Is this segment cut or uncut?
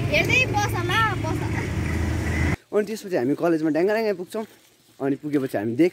cut